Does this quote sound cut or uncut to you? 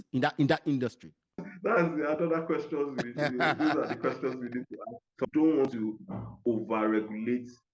cut